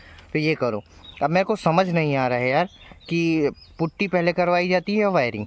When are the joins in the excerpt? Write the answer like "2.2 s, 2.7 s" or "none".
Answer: none